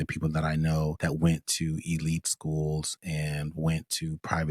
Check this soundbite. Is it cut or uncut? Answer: cut